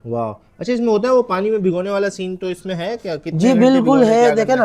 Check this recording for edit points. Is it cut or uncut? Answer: uncut